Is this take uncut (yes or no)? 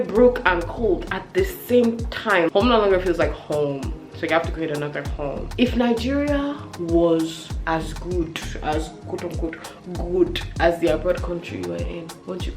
no